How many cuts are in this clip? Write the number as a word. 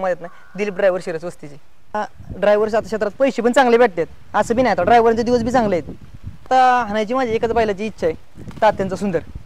two